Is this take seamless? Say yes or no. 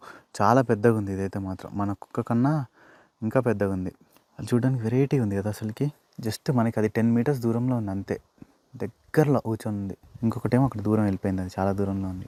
yes